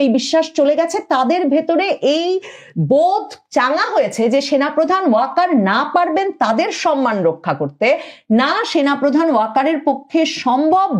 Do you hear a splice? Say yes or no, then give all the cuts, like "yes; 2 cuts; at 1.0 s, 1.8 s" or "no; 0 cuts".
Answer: no; 0 cuts